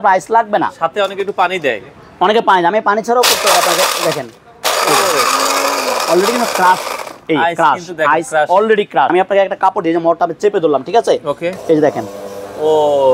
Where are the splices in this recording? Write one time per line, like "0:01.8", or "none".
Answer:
0:09.1